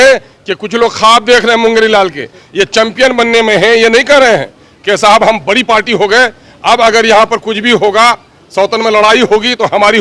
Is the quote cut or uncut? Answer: uncut